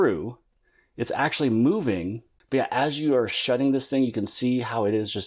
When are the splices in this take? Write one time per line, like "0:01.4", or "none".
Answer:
0:02.3